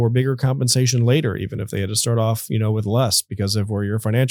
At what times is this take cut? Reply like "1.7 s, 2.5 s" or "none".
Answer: none